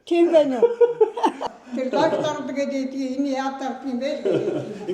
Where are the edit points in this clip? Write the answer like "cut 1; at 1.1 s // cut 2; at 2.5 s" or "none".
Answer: cut 1; at 1.4 s